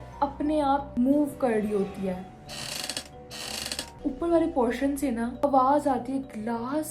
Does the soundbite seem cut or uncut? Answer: cut